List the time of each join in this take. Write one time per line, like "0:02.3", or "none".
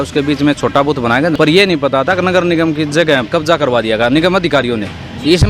0:01.3
0:03.3